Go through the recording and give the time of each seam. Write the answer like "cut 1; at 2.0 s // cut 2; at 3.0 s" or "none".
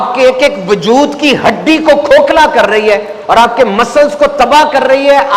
none